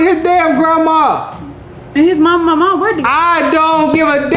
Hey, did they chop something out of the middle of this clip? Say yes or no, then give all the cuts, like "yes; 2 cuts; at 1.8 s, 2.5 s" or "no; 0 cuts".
no; 0 cuts